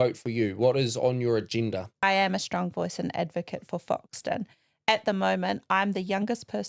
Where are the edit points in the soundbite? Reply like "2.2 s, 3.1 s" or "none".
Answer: 2.0 s